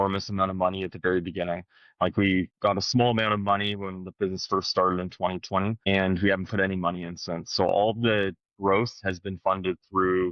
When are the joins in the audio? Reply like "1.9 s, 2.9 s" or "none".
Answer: 2.5 s, 5.8 s